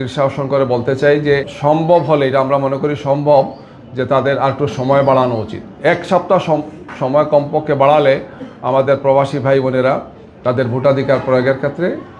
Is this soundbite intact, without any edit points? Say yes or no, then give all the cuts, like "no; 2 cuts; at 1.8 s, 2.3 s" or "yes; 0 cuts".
no; 1 cut; at 1.5 s